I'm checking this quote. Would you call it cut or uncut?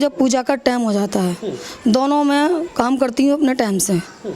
uncut